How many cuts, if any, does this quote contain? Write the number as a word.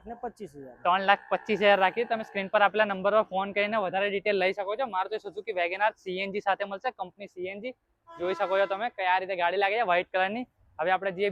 zero